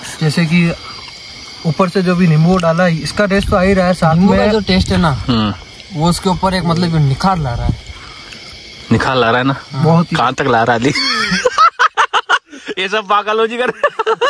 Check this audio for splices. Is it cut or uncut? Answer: uncut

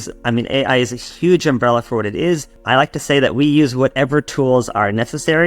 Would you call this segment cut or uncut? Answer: cut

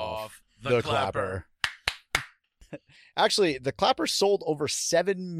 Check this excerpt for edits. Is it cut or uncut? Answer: cut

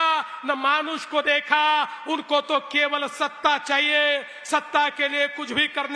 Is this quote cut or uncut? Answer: uncut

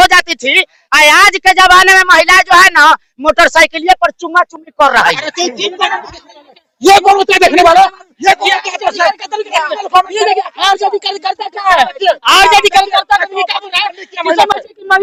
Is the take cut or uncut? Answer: uncut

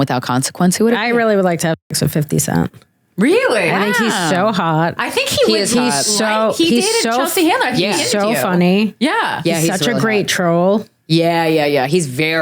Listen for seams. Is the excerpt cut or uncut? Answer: cut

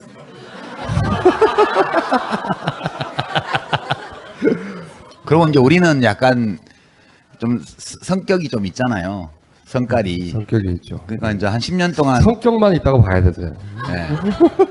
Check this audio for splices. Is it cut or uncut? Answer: cut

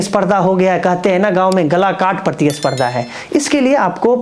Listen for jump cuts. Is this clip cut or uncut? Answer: uncut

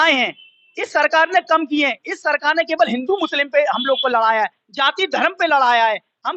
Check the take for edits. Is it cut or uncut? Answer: uncut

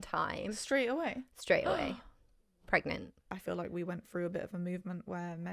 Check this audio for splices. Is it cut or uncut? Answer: cut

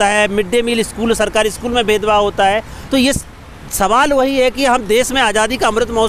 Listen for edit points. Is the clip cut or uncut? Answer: uncut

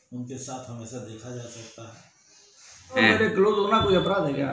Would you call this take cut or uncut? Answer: cut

